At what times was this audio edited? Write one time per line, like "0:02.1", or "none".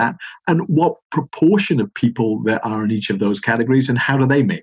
none